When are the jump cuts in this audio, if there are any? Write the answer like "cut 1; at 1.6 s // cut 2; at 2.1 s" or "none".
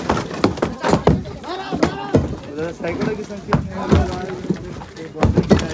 none